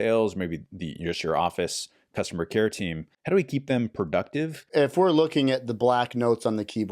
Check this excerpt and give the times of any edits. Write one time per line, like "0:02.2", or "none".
0:03.1
0:04.7